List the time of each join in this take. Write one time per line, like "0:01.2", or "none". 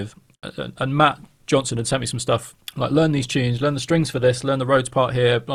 0:02.6